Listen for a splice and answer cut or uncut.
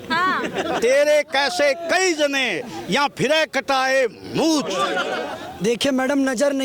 cut